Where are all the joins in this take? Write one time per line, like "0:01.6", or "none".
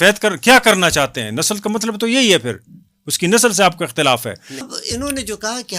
0:04.8